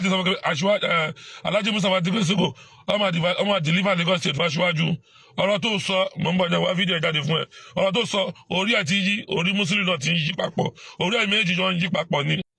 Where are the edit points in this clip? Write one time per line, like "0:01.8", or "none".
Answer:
none